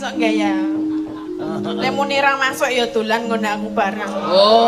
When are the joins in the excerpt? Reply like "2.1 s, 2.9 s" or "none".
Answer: none